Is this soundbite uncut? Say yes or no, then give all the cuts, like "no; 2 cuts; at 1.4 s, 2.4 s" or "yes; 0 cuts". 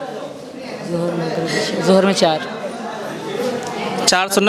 yes; 0 cuts